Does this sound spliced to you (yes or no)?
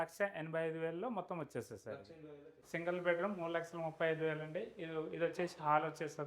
yes